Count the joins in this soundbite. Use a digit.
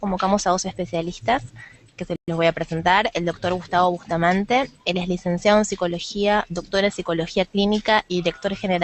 0